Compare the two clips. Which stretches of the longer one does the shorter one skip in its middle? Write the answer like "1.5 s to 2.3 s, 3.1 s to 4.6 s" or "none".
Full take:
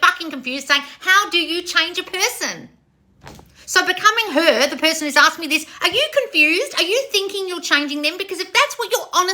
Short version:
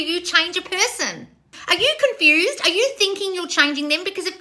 3.0 s to 5.7 s